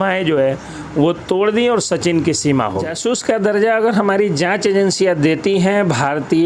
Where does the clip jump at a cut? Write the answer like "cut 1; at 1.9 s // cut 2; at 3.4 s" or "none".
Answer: cut 1; at 2.9 s